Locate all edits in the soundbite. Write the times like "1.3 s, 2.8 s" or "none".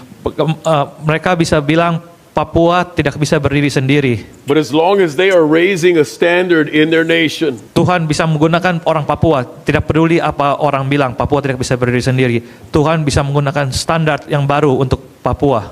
7.6 s